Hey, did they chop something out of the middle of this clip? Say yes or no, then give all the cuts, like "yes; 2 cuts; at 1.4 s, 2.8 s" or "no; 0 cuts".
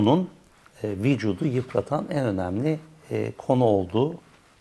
no; 0 cuts